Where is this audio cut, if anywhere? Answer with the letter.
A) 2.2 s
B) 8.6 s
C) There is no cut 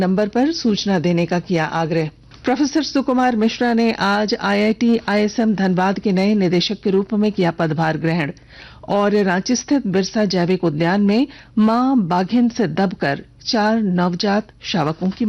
A